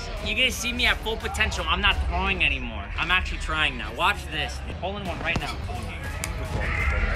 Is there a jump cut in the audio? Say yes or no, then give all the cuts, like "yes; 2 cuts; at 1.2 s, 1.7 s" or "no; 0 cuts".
yes; 2 cuts; at 4.7 s, 5.6 s